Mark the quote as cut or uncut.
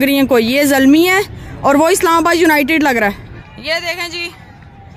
cut